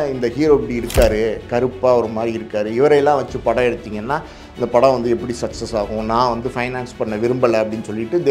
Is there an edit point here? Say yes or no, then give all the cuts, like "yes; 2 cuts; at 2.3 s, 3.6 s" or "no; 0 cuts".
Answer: no; 0 cuts